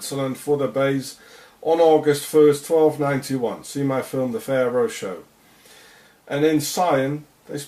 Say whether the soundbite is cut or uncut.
cut